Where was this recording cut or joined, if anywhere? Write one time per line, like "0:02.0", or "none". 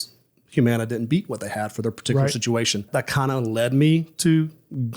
0:02.9